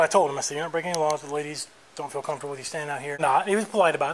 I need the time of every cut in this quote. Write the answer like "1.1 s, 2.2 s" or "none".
3.2 s